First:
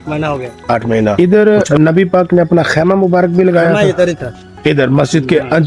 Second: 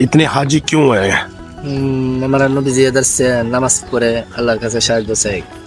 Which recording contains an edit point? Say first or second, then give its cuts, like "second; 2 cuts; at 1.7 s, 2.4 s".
first; 1 cut; at 1.1 s